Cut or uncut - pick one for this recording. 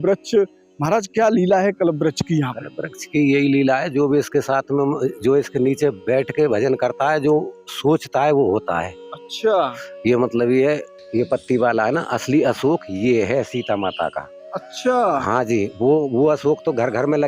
cut